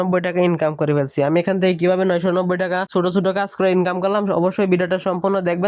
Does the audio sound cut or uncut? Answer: cut